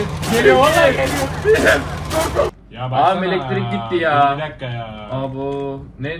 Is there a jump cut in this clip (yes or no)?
yes